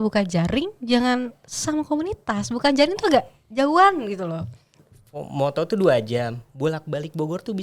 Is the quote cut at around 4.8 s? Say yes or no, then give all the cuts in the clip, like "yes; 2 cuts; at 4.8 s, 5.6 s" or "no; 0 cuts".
yes; 1 cut; at 4.8 s